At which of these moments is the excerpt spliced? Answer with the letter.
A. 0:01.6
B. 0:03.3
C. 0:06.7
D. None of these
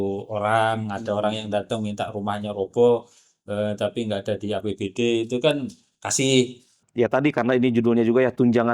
C